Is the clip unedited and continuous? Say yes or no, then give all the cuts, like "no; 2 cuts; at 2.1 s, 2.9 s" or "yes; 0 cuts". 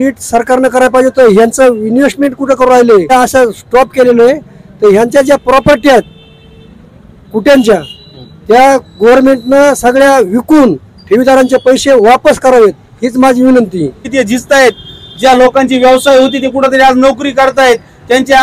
no; 2 cuts; at 3.1 s, 14.1 s